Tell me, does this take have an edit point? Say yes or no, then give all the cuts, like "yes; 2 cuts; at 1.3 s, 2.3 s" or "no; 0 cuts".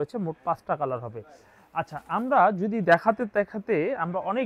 no; 0 cuts